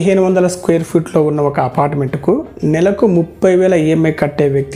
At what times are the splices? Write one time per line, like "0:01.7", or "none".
none